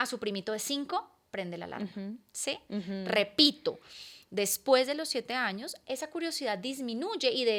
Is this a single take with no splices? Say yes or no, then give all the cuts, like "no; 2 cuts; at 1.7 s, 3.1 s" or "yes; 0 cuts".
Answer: yes; 0 cuts